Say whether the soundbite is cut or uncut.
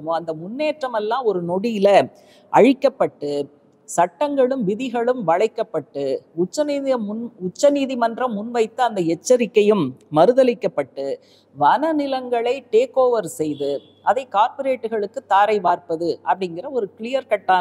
uncut